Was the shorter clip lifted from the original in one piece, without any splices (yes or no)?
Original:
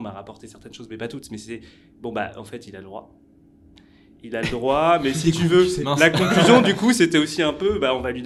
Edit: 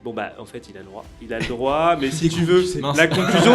no